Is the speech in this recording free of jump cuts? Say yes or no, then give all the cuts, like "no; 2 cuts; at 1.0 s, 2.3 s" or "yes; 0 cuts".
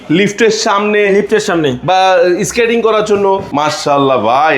no; 1 cut; at 3.5 s